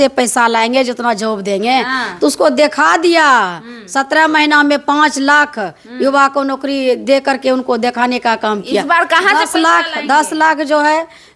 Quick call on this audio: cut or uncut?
uncut